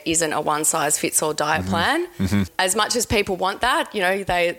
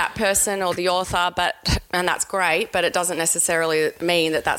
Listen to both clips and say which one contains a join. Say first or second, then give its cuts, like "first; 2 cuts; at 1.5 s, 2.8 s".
first; 1 cut; at 2.5 s